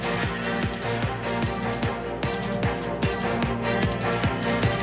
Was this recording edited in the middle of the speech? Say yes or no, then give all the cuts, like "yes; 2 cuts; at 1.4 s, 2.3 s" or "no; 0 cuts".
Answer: yes; 1 cut; at 1.7 s